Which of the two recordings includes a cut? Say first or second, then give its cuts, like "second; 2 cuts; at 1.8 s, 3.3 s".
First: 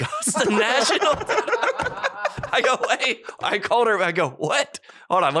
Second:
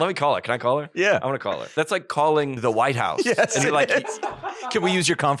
second; 2 cuts; at 1.7 s, 2.6 s